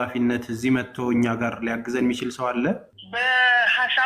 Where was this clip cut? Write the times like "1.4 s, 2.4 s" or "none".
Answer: 3.0 s